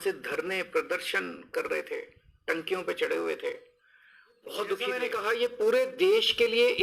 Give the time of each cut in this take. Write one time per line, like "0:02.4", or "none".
0:05.1